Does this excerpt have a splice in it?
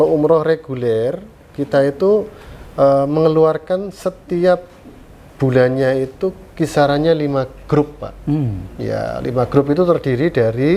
no; 0 cuts

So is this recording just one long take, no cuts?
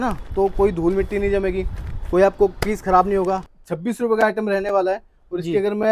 no; 1 cut; at 3.5 s

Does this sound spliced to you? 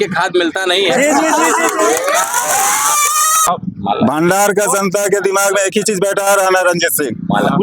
yes; 1 cut; at 3.5 s

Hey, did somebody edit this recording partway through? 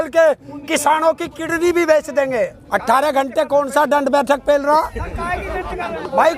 yes; 1 cut; at 2.6 s

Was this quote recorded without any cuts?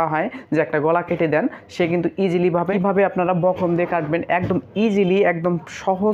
no; 1 cut; at 2.7 s

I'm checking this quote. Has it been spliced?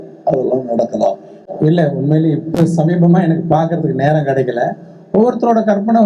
yes; 1 cut; at 1.3 s

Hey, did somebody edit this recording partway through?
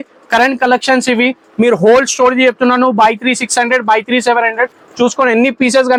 no; 0 cuts

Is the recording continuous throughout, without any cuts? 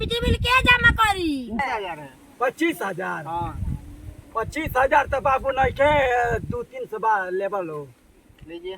no; 1 cut; at 1.6 s

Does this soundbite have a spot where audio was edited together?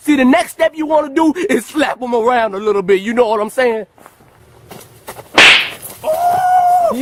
no; 0 cuts

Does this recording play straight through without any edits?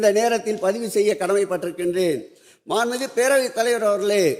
yes; 0 cuts

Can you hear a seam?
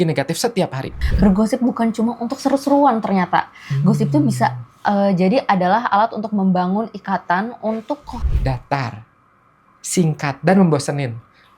yes; 2 cuts; at 1.0 s, 8.2 s

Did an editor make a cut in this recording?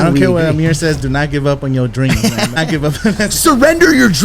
yes; 1 cut; at 2.6 s

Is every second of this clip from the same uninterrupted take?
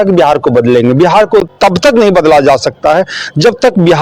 no; 1 cut; at 1.5 s

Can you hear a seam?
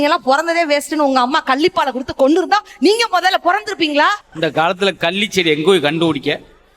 yes; 1 cut; at 4.3 s

